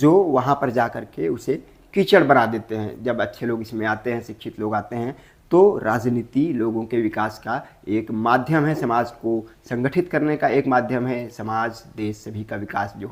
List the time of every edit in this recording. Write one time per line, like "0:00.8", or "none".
none